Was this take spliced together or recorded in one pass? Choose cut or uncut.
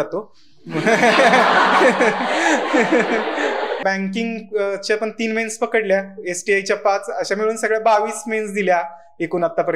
cut